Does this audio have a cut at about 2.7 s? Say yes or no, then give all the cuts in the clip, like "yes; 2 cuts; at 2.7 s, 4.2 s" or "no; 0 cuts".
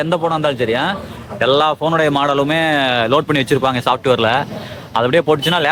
no; 0 cuts